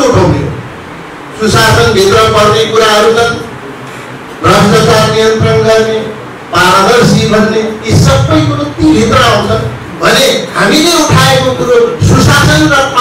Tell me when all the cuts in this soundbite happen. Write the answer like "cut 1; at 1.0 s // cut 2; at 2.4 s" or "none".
none